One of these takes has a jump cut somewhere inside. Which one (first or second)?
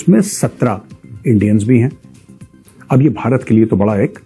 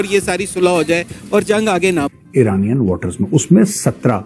second